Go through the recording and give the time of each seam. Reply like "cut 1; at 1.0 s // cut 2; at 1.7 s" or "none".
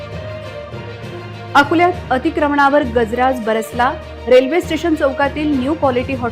cut 1; at 0.9 s